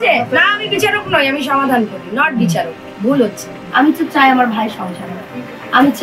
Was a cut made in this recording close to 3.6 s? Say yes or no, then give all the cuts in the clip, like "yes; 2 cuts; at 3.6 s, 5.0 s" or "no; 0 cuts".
yes; 1 cut; at 3.6 s